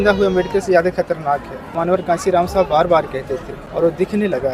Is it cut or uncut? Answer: cut